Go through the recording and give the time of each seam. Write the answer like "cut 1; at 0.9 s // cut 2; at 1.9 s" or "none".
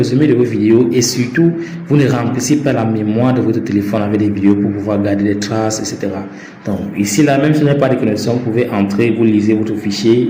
none

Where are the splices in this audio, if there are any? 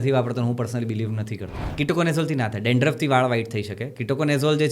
cut 1; at 1.6 s

